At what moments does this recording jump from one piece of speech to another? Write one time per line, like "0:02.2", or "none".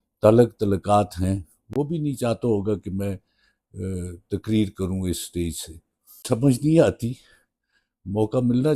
0:06.2